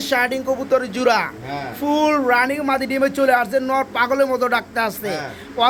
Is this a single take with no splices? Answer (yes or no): yes